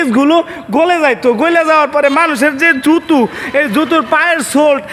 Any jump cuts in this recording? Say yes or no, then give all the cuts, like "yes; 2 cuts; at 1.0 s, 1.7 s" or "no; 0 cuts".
no; 0 cuts